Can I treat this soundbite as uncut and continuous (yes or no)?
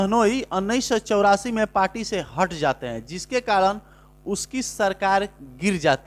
yes